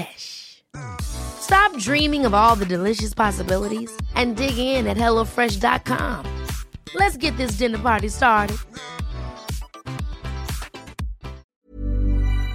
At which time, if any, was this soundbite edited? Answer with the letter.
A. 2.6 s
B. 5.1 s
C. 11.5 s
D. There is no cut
C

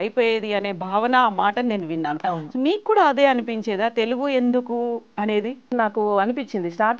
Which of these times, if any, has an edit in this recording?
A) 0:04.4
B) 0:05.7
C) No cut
B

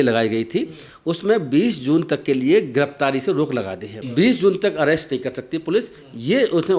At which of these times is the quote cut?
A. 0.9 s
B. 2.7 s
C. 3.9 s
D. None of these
C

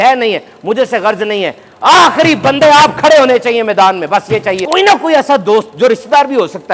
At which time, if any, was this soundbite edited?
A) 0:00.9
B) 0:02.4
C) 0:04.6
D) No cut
C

